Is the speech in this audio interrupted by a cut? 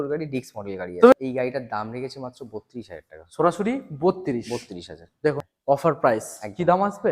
yes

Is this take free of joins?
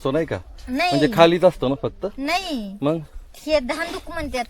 yes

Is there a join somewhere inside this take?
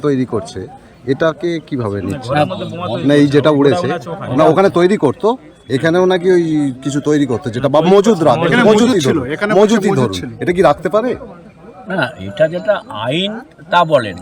no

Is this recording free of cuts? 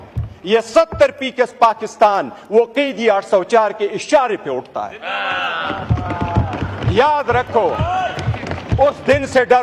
yes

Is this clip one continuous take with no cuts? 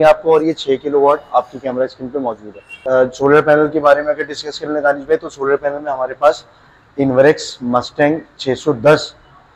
no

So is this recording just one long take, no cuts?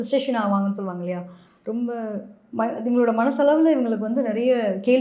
yes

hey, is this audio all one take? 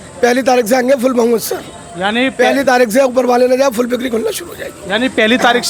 yes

